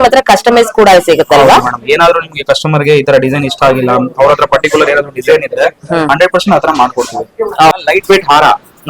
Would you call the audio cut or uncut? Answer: cut